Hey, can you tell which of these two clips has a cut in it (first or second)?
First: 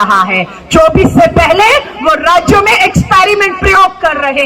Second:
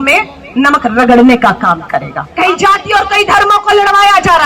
second